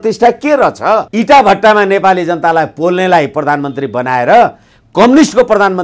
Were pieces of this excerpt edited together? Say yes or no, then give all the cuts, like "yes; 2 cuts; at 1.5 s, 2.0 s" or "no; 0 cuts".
yes; 1 cut; at 1.1 s